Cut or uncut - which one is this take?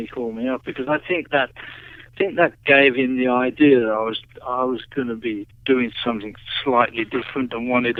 uncut